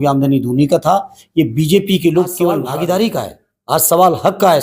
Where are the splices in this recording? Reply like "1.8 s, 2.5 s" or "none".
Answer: 2.6 s